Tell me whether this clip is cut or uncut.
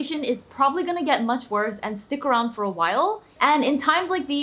cut